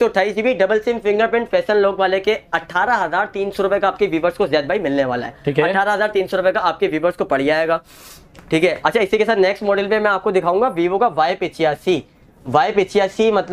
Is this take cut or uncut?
uncut